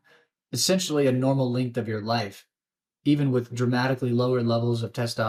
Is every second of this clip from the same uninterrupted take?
yes; 0 cuts

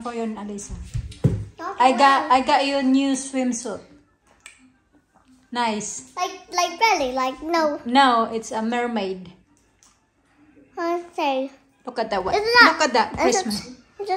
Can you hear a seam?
no; 0 cuts

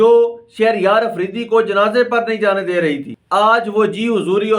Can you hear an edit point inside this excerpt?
yes; 1 cut; at 3.1 s

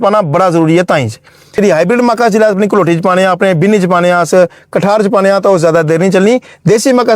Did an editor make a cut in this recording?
yes; 1 cut; at 1.6 s

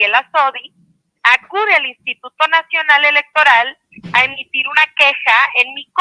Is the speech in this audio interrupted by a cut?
no; 0 cuts

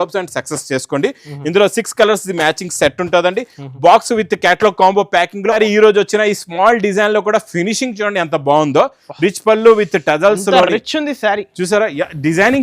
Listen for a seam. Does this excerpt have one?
yes; 1 cut; at 5.6 s

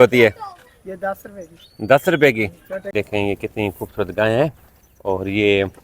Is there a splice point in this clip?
yes; 1 cut; at 2.9 s

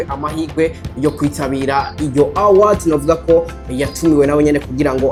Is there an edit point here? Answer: no; 0 cuts

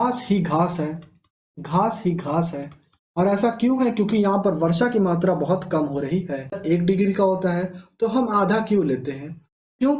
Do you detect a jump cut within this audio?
yes; 1 cut; at 6.6 s

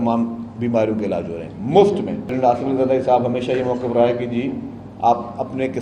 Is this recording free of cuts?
no; 1 cut; at 2.3 s

